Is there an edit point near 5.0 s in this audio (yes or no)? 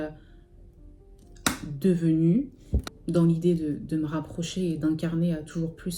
no